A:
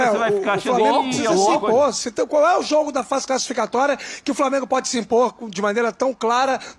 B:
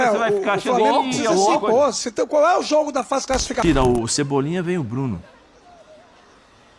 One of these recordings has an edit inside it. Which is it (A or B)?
B